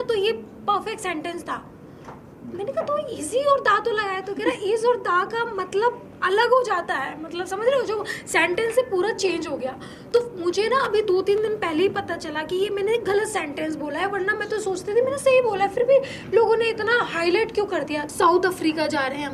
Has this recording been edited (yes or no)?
yes